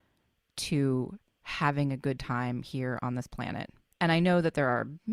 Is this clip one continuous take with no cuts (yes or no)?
no